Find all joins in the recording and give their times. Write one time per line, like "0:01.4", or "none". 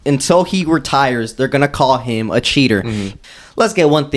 0:03.1